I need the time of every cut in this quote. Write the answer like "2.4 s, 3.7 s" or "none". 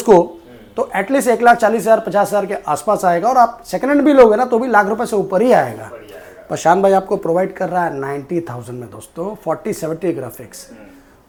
none